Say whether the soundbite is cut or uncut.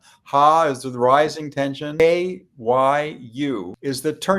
cut